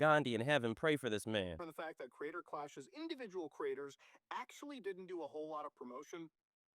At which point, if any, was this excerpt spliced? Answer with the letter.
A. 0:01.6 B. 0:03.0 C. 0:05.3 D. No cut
A